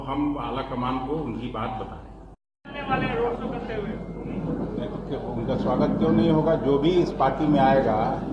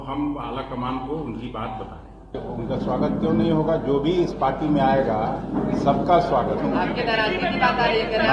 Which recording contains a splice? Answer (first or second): second